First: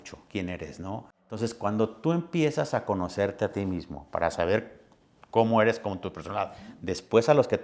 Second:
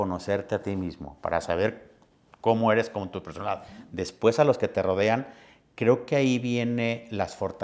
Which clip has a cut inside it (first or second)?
first